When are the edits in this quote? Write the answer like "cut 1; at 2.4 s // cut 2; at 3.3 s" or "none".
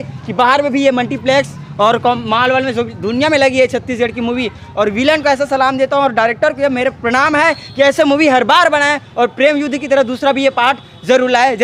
none